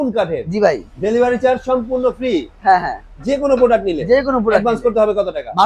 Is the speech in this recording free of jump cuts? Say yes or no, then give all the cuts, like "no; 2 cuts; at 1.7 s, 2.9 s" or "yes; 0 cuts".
yes; 0 cuts